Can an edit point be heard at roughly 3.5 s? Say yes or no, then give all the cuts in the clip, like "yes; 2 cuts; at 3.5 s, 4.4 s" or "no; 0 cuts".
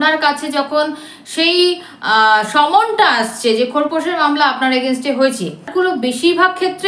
no; 1 cut; at 5.7 s